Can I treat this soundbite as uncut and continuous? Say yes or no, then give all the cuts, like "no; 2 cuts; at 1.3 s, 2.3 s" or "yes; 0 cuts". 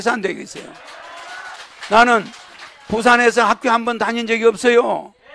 yes; 0 cuts